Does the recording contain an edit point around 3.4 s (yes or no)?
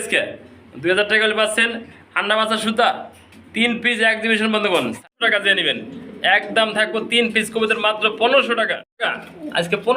no